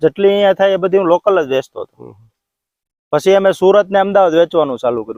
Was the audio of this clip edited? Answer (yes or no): no